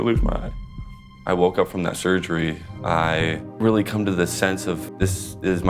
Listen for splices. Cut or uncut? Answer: cut